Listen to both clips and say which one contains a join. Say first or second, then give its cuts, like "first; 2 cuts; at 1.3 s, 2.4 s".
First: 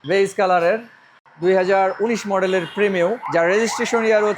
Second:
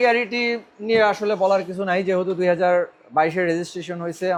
first; 2 cuts; at 1.2 s, 3.2 s